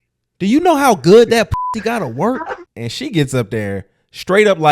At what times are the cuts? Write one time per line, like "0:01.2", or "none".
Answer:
0:02.7